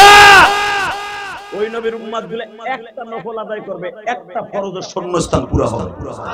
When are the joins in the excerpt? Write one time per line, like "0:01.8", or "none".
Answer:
none

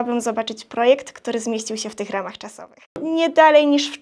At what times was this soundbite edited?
0:03.0

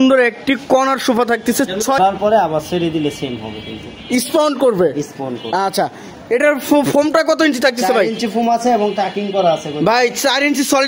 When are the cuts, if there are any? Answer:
0:02.0

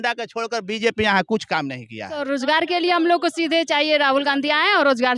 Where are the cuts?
0:02.2

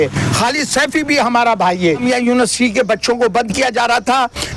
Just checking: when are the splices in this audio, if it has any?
0:02.0

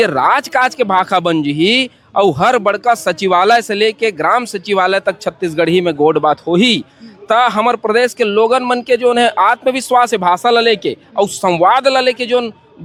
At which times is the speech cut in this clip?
none

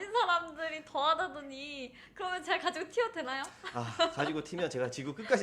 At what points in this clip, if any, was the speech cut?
none

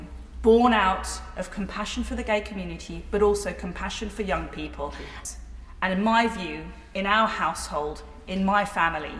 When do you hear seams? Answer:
0:05.1

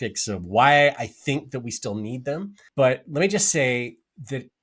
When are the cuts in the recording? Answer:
0:02.6

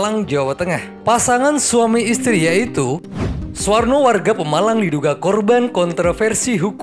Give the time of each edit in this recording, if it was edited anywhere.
none

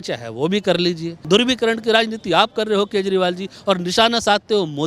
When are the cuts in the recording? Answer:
0:01.1

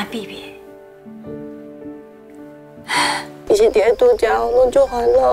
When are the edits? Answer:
0:03.4

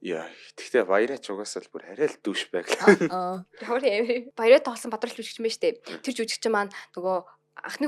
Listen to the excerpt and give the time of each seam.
0:04.3

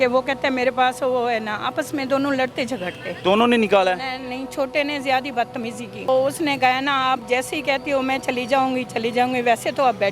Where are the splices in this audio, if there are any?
0:03.0
0:06.1

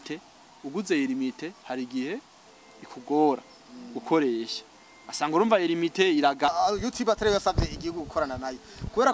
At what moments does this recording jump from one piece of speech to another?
0:06.5

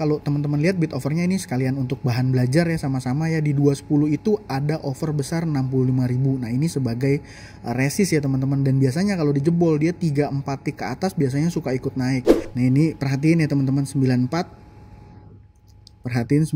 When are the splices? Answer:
0:12.4

